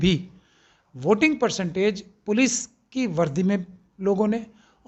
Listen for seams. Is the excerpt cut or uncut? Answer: uncut